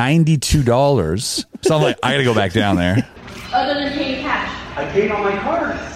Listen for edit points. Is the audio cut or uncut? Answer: cut